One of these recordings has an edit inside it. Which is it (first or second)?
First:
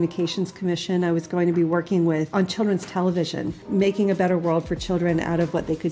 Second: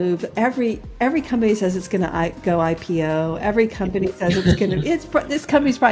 first